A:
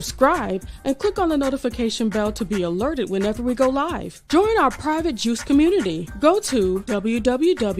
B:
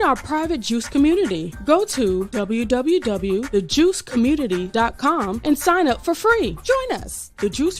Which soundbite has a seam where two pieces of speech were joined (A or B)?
B